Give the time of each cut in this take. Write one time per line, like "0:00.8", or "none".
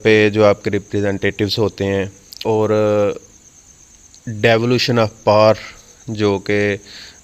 0:02.2

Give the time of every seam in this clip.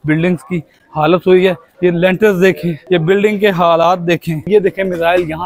0:01.7
0:02.7
0:04.5

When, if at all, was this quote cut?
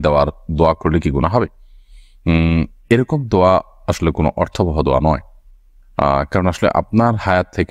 none

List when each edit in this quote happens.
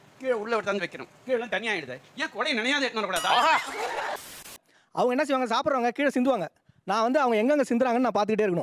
0:04.5

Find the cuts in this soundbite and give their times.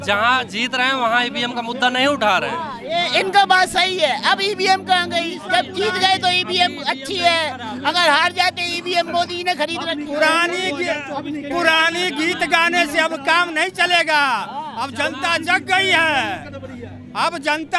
none

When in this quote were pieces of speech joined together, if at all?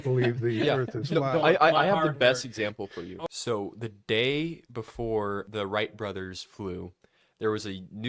0:03.0
0:05.4

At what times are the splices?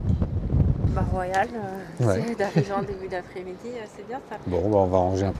0:00.9
0:04.4

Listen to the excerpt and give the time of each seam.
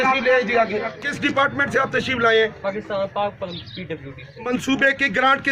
0:01.1
0:04.3

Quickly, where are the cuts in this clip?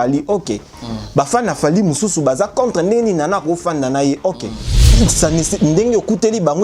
0:04.8

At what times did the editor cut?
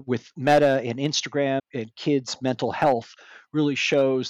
0:01.6

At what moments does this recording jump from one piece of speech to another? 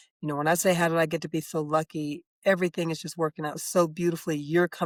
none

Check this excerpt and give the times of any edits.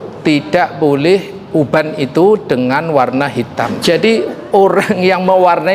0:03.7

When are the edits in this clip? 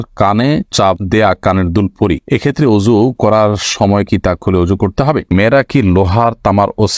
0:05.3

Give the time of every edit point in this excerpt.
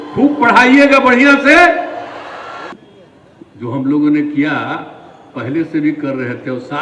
0:02.7

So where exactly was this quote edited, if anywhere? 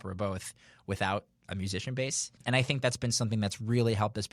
0:01.4
0:02.3

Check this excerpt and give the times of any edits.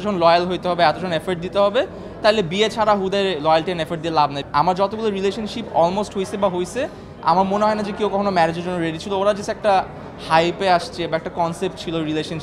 0:04.4

